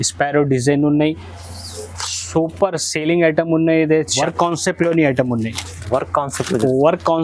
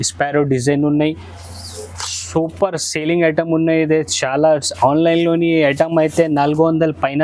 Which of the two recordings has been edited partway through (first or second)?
first